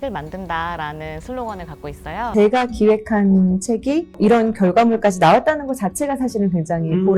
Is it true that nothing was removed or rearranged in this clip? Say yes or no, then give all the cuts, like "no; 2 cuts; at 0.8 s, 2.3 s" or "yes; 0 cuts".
no; 2 cuts; at 2.2 s, 4.1 s